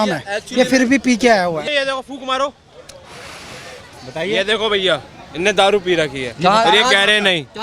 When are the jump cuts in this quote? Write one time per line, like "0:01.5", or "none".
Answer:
0:01.7